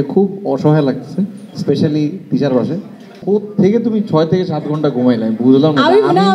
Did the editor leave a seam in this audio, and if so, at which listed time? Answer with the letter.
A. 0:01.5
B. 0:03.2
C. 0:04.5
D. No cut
B